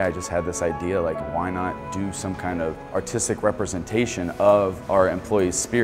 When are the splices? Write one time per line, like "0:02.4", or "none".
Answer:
0:01.4
0:02.8
0:04.8